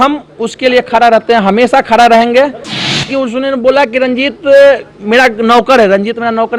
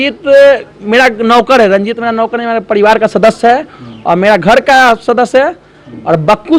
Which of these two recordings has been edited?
first; 1 cut; at 2.9 s

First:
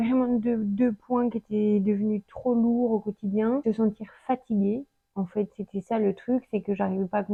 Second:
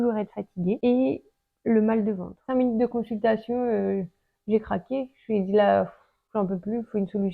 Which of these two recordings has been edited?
second; 2 cuts; at 0.8 s, 2.2 s

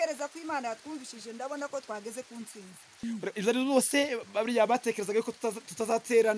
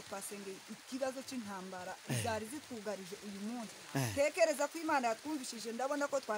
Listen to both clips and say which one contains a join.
first; 1 cut; at 2.9 s

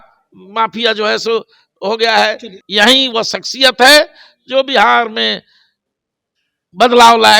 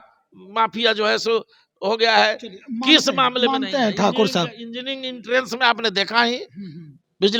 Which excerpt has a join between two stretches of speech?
first; 1 cut; at 2.5 s

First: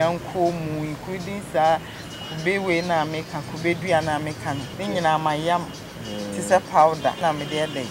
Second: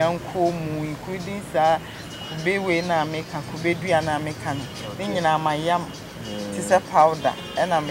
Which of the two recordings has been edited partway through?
first; 2 cuts; at 4.7 s, 7.2 s

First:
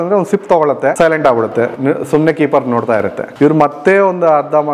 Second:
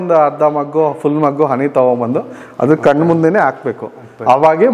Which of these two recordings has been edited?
first; 2 cuts; at 0.9 s, 3.2 s

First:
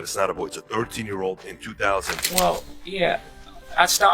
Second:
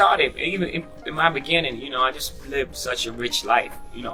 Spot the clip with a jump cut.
first; 1 cut; at 2.2 s

